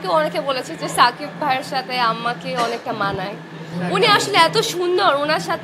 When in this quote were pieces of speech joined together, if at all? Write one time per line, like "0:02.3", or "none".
none

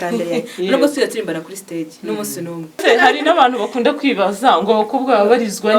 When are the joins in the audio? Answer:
0:02.8

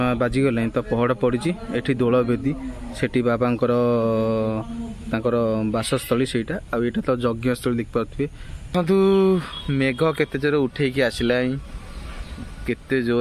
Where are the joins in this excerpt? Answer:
0:08.7

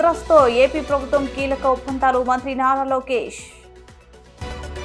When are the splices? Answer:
none

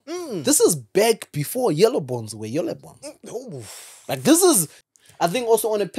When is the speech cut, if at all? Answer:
0:04.8

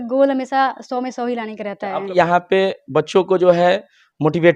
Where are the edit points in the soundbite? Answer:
0:02.1

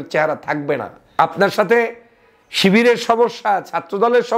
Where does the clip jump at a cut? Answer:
0:01.0

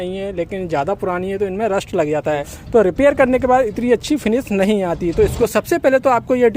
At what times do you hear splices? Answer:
0:02.5
0:05.4

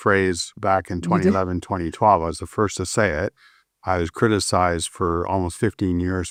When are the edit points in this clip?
none

